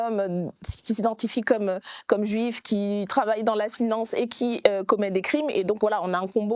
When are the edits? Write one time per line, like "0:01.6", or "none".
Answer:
none